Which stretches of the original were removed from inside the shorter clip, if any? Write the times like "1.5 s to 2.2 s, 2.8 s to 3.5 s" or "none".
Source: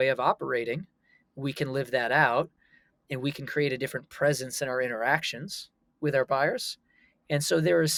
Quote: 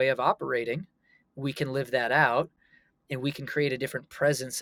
none